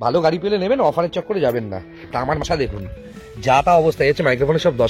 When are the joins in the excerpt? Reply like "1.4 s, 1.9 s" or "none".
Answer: 2.1 s